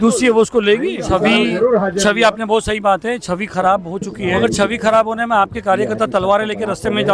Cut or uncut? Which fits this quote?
cut